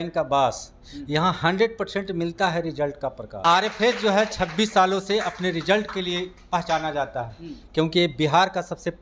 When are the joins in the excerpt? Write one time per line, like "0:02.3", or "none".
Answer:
0:03.3